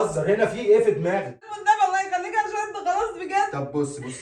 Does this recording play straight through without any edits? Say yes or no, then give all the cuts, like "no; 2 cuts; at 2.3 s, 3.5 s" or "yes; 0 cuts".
no; 1 cut; at 1.5 s